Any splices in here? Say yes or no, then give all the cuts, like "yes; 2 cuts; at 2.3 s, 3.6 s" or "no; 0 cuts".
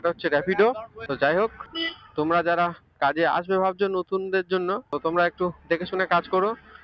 no; 0 cuts